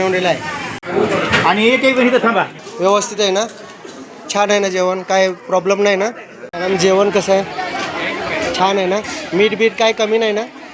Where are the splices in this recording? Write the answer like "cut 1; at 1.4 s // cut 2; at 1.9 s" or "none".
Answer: cut 1; at 2.6 s // cut 2; at 6.5 s